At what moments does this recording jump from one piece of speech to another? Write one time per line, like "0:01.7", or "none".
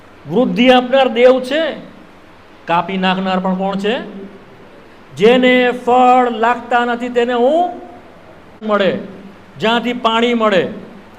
0:08.6